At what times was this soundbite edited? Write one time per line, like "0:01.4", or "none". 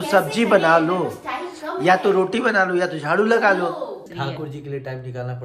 0:04.0